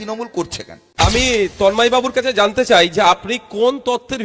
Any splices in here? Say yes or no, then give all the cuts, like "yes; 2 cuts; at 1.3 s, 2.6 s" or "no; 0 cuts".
yes; 1 cut; at 1.0 s